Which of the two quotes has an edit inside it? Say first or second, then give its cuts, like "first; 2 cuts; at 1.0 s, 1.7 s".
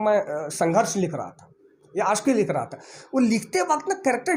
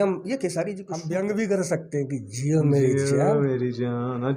second; 1 cut; at 0.9 s